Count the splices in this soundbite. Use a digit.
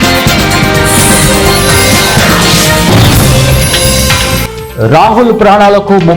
0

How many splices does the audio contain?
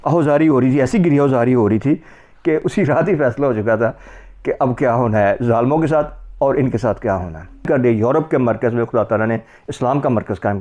2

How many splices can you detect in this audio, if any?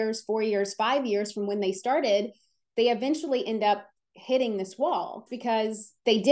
1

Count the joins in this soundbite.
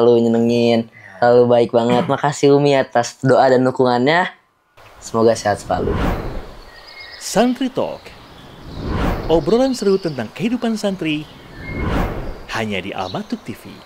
1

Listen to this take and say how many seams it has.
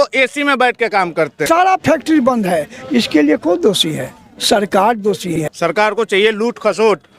2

